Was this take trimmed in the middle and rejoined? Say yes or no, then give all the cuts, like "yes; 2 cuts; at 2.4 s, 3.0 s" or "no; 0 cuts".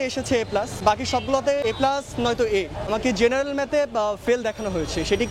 yes; 3 cuts; at 0.8 s, 1.6 s, 2.8 s